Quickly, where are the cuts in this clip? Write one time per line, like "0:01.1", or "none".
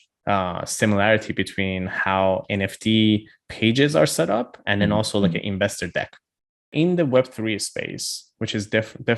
0:06.7